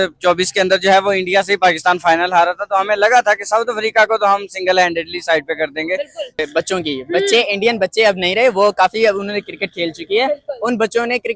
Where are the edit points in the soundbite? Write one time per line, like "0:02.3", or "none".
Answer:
0:06.4